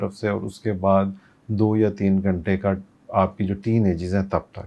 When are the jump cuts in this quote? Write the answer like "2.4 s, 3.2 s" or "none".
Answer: none